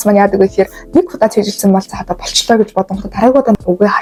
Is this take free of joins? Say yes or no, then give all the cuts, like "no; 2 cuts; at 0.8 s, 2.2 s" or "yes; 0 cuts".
yes; 0 cuts